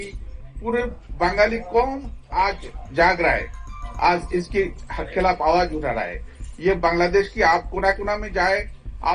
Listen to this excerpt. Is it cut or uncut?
uncut